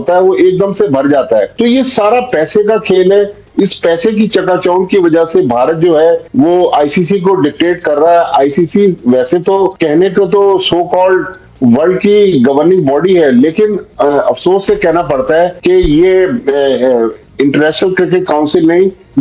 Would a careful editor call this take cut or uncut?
uncut